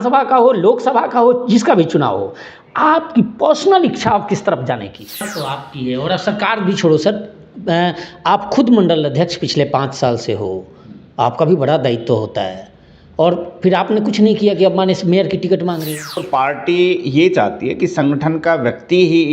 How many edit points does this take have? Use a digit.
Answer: 2